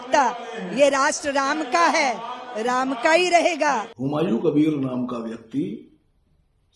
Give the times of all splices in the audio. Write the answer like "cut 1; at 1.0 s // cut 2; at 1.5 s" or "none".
cut 1; at 3.9 s